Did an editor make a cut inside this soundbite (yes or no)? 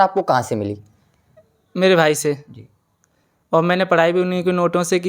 no